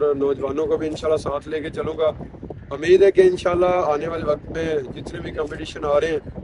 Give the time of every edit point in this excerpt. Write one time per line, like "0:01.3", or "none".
none